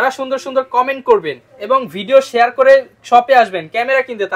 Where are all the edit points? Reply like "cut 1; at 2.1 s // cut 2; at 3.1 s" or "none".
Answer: none

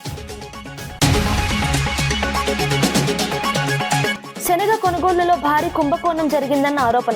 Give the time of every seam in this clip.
none

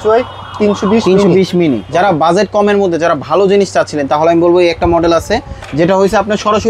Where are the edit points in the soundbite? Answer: cut 1; at 1.9 s

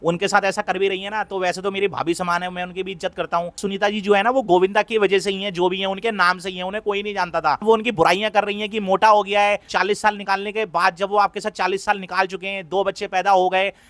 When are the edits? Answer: cut 1; at 3.6 s // cut 2; at 7.6 s // cut 3; at 9.7 s

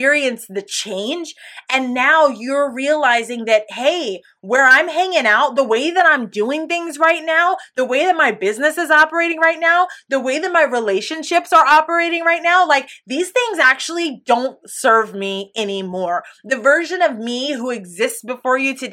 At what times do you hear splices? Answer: none

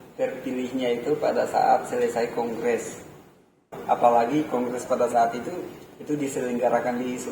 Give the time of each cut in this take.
cut 1; at 3.7 s

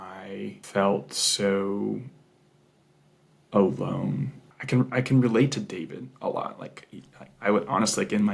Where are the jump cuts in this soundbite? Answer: none

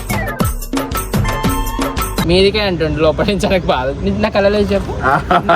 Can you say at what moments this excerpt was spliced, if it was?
cut 1; at 2.1 s

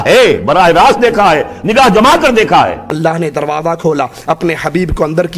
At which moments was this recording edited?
cut 1; at 2.9 s

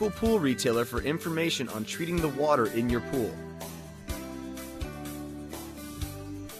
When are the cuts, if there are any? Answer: cut 1; at 3.3 s

